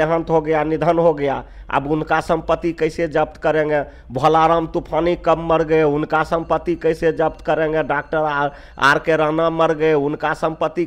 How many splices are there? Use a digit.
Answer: 0